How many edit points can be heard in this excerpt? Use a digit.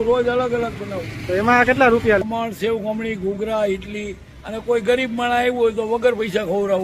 1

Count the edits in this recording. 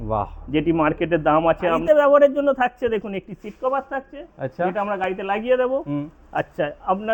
1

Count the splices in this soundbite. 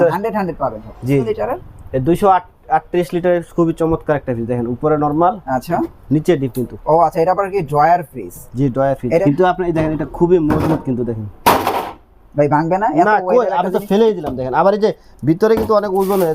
2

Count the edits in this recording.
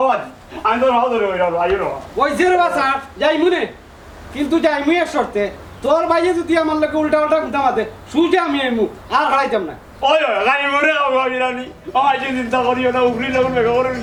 0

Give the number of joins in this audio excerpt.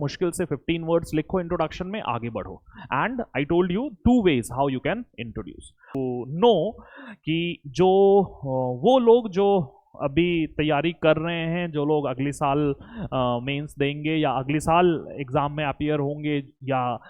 1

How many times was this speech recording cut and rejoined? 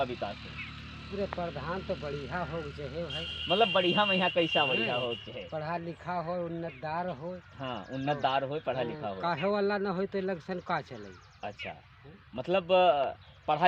0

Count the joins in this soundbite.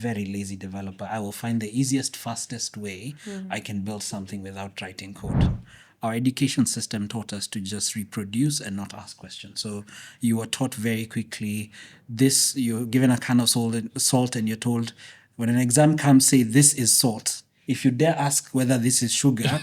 1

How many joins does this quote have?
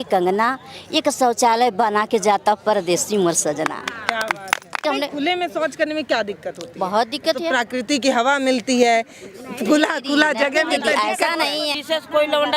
2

